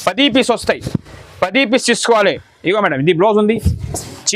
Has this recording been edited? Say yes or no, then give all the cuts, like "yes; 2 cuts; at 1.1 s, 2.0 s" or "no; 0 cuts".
yes; 1 cut; at 2.5 s